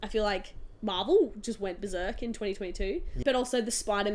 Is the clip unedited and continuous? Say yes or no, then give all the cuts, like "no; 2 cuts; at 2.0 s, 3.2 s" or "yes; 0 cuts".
no; 1 cut; at 3.2 s